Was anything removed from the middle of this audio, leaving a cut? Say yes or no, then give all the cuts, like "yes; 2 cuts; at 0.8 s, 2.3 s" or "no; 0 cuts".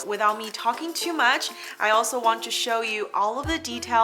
no; 0 cuts